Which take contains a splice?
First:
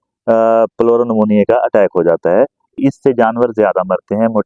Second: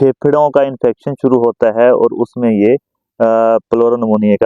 first; 1 cut; at 2.8 s

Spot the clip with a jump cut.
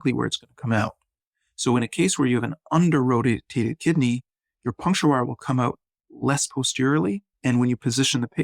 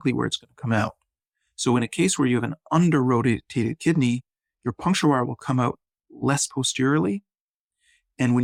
first; 1 cut; at 7.3 s

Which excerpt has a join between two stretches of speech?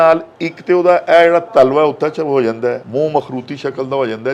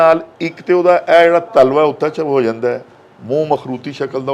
first; 1 cut; at 2.8 s

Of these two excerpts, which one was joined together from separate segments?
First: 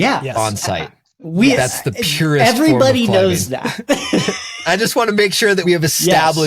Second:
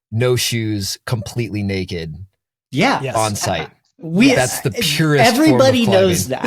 first; 2 cuts; at 4.6 s, 5.6 s

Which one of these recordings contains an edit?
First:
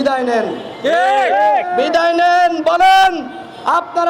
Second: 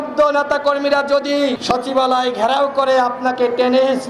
second; 1 cut; at 1.6 s

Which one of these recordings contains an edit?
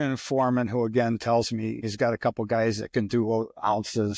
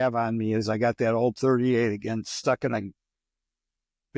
first; 1 cut; at 1.8 s

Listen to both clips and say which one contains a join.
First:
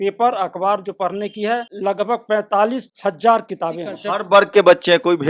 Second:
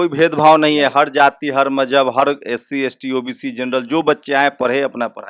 first; 3 cuts; at 1.7 s, 2.9 s, 4.0 s

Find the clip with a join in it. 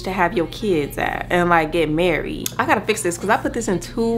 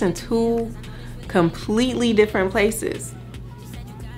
first; 1 cut; at 2.4 s

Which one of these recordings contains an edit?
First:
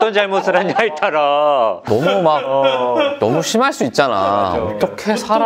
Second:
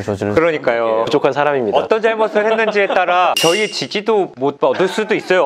second; 1 cut; at 4.5 s

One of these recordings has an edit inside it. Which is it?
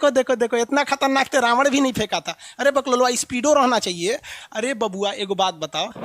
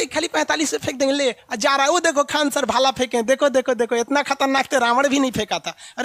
first; 1 cut; at 4.3 s

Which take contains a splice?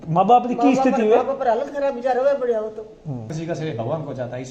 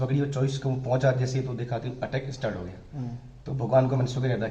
first; 1 cut; at 3.3 s

